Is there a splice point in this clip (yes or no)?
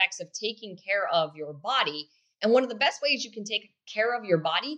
no